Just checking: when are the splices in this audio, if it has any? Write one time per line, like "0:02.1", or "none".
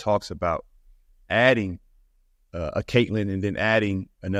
none